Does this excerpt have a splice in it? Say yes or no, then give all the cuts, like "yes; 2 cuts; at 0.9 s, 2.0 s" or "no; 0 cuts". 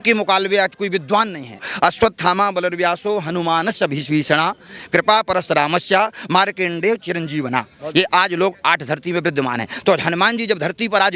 yes; 1 cut; at 1.6 s